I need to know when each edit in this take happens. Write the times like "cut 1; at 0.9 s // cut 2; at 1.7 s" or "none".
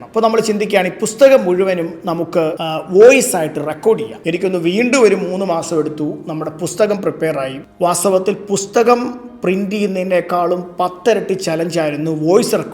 cut 1; at 2.6 s // cut 2; at 4.1 s // cut 3; at 7.6 s